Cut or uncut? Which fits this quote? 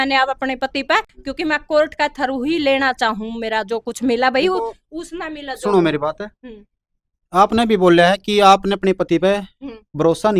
uncut